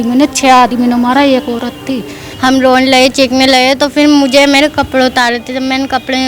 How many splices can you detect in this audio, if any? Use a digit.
1